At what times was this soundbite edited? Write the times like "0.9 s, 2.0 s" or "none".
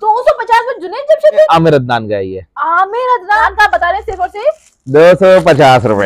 1.5 s, 3.4 s